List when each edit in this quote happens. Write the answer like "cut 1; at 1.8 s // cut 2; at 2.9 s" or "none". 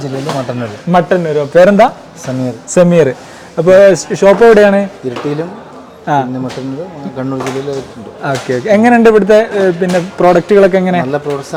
none